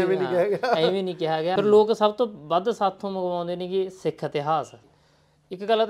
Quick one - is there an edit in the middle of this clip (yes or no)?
yes